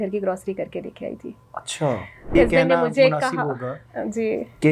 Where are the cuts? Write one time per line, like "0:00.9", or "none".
0:02.3